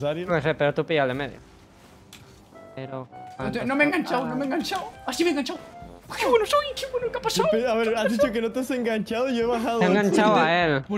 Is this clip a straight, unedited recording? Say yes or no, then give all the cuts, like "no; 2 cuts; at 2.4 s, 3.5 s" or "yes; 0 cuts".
yes; 0 cuts